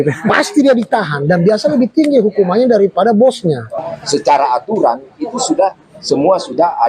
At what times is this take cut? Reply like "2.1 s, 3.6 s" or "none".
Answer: 3.7 s